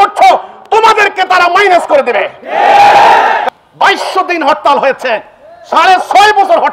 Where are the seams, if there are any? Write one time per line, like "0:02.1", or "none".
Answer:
0:03.4